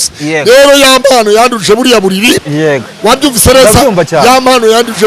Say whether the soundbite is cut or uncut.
uncut